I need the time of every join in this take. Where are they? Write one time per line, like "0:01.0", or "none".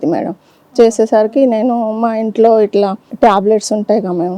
0:03.0